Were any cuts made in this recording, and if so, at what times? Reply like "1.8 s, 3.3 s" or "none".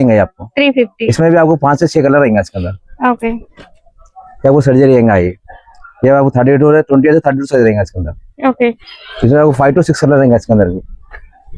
none